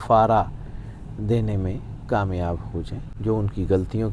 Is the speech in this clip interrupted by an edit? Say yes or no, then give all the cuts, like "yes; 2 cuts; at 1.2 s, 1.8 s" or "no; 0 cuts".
no; 0 cuts